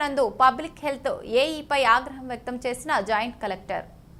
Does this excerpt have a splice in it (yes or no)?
no